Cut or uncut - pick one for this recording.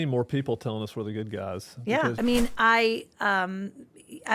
cut